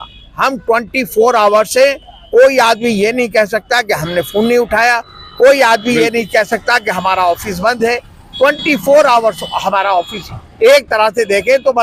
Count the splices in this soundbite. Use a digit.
0